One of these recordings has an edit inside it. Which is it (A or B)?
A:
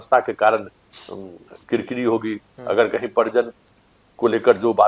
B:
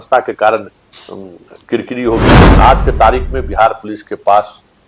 B